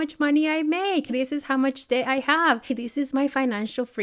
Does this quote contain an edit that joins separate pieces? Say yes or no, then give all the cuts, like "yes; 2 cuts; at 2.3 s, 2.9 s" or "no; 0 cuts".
yes; 2 cuts; at 1.1 s, 2.7 s